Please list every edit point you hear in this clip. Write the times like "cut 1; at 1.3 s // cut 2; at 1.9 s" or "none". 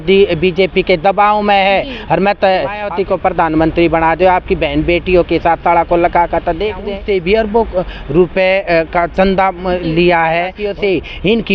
cut 1; at 2.8 s // cut 2; at 6.9 s // cut 3; at 10.6 s

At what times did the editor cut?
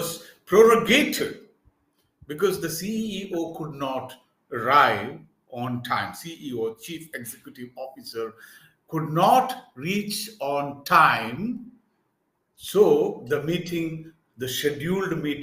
none

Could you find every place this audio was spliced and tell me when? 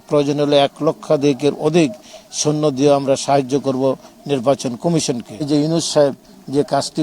cut 1; at 5.3 s

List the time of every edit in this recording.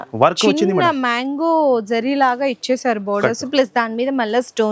none

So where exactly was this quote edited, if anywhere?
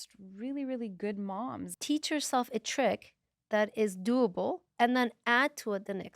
cut 1; at 1.7 s

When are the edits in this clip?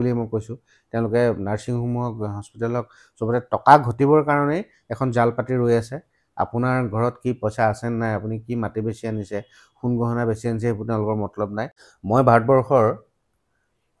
cut 1; at 11.8 s

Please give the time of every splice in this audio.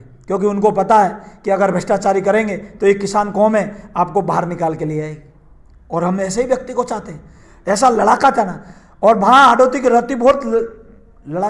none

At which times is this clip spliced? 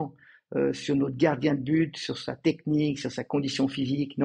none

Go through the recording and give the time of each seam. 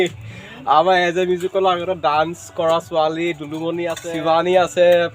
cut 1; at 4.1 s

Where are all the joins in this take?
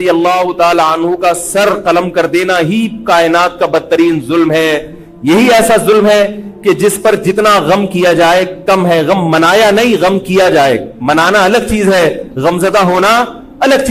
none

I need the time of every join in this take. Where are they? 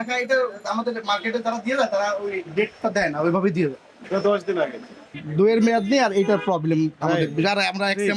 cut 1; at 4.0 s // cut 2; at 5.2 s

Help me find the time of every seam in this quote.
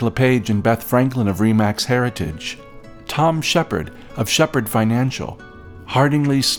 none

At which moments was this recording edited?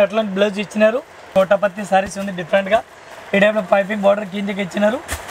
cut 1; at 1.3 s

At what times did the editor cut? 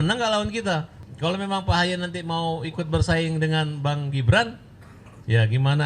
cut 1; at 1.0 s

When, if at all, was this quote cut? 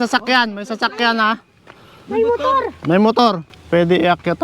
cut 1; at 3.5 s

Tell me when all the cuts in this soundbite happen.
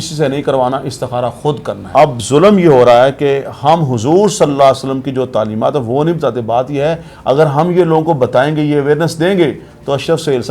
cut 1; at 1.7 s

